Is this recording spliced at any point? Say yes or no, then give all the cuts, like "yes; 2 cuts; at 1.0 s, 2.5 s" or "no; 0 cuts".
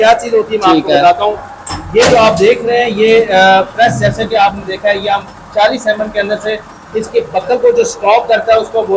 no; 0 cuts